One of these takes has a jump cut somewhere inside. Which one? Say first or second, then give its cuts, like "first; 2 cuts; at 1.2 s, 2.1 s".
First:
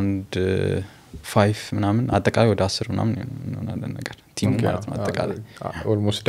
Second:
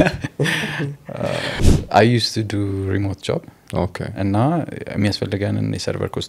second; 1 cut; at 1.6 s